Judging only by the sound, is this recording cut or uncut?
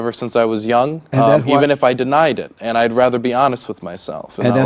cut